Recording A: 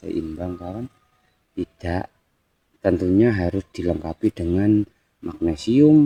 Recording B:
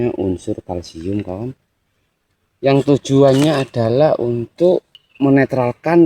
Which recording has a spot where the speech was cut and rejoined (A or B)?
B